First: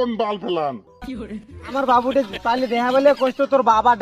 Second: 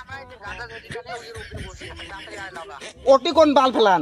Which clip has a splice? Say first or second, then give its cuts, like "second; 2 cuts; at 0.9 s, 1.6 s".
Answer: first; 1 cut; at 1.6 s